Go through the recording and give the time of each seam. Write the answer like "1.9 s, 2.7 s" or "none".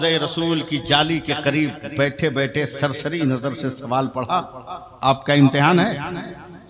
none